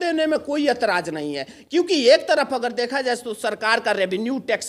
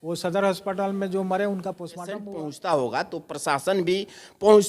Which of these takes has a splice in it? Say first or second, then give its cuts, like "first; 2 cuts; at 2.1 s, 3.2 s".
second; 1 cut; at 2.2 s